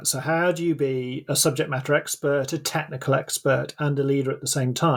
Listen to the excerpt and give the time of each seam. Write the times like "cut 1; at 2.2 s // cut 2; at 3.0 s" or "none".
none

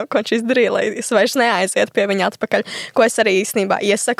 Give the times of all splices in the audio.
none

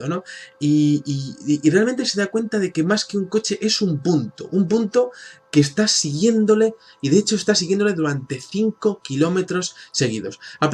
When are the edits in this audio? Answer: cut 1; at 1.8 s

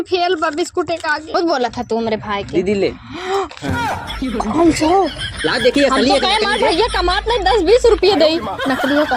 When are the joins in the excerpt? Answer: cut 1; at 1.3 s

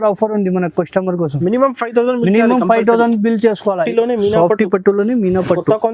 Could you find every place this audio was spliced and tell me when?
cut 1; at 3.8 s

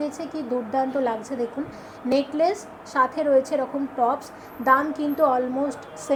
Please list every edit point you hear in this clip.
none

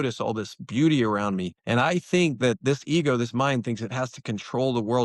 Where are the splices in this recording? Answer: cut 1; at 1.5 s

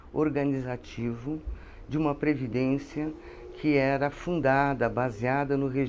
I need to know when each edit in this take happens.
none

